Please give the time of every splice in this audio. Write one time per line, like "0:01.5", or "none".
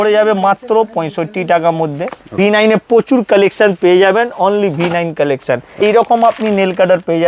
0:02.3
0:05.7